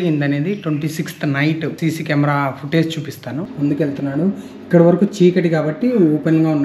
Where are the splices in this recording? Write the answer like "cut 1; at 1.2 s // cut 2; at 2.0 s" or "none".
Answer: cut 1; at 1.8 s // cut 2; at 3.5 s